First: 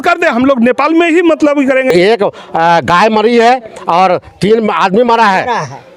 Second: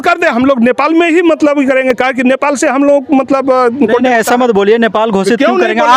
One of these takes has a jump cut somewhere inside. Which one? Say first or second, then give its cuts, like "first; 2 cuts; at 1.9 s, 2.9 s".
first; 1 cut; at 1.9 s